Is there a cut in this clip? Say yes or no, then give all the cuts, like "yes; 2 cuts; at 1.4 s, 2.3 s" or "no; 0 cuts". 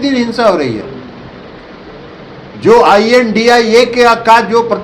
no; 0 cuts